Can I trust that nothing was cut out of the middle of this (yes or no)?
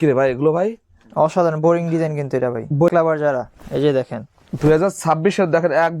no